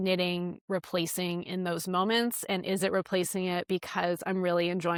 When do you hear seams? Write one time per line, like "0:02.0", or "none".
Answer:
none